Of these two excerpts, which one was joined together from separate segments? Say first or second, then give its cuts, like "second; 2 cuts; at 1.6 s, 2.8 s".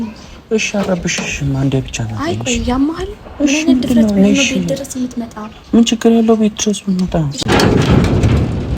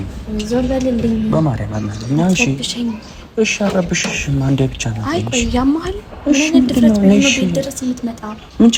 first; 1 cut; at 7.3 s